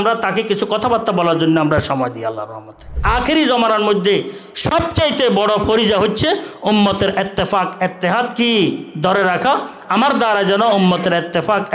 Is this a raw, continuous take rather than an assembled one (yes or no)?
no